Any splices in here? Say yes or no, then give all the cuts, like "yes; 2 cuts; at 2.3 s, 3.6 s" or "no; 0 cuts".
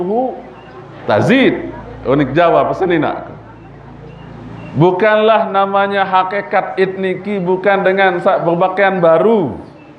no; 0 cuts